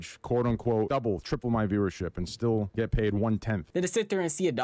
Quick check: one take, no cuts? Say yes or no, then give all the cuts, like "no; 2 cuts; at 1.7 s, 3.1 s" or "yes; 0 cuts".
no; 3 cuts; at 0.9 s, 2.7 s, 3.7 s